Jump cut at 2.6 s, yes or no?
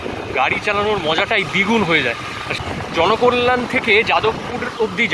yes